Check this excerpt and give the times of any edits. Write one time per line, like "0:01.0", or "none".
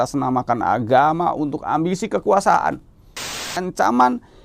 0:03.5

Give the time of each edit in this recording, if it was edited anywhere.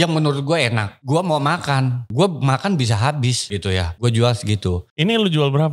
0:00.9
0:02.0
0:03.6
0:04.9

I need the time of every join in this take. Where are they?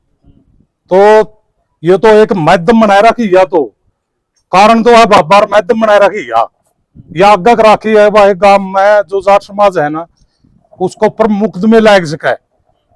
none

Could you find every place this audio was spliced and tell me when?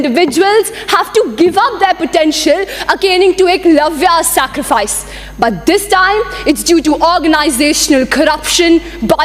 none

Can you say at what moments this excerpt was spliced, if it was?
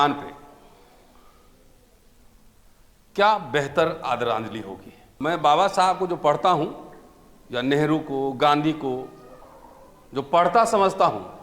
0:05.0

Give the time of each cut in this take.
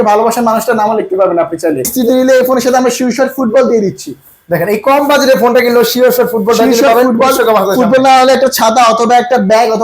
0:01.9

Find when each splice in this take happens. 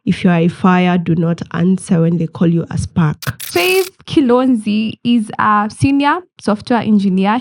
0:03.5

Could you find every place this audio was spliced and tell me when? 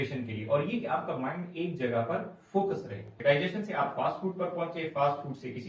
0:03.1

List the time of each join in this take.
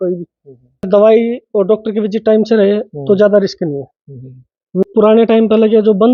0:00.9
0:04.8

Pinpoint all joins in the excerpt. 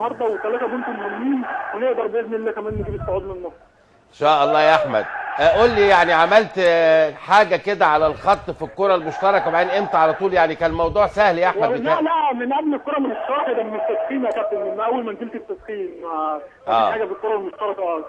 none

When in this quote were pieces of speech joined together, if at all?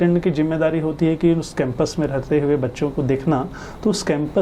none

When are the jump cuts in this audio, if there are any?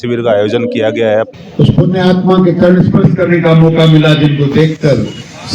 0:01.4

